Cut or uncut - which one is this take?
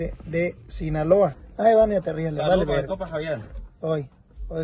cut